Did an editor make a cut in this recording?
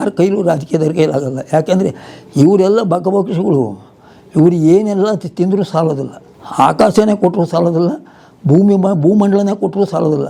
no; 0 cuts

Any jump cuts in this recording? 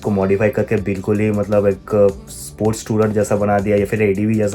no; 0 cuts

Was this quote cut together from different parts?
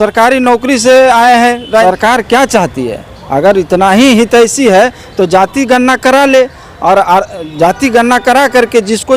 yes; 1 cut; at 1.8 s

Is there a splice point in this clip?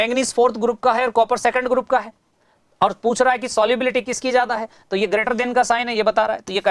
no; 0 cuts

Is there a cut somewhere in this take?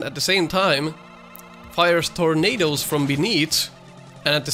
no; 0 cuts

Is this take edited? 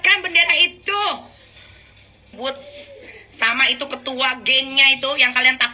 yes; 1 cut; at 2.3 s

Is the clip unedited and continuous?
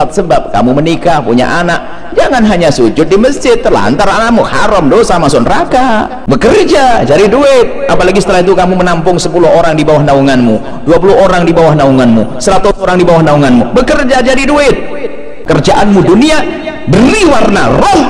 no; 2 cuts; at 6.1 s, 15.4 s

